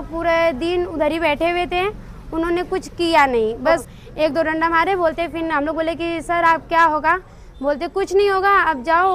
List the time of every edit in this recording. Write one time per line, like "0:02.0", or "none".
0:03.8